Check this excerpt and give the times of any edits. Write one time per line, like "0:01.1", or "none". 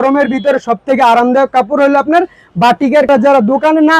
0:03.1